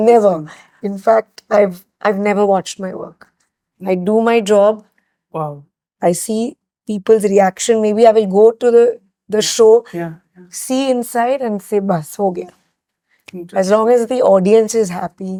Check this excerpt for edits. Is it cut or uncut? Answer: uncut